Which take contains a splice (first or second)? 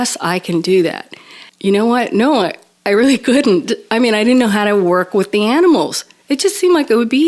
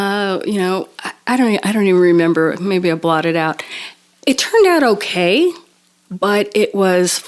first